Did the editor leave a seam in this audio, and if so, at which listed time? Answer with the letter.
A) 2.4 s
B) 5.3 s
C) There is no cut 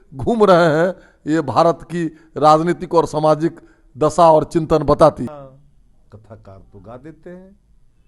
B